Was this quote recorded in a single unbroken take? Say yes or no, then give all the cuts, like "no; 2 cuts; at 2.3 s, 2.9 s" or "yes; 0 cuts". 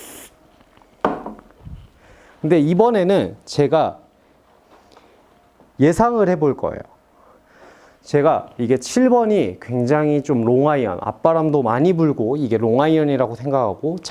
yes; 0 cuts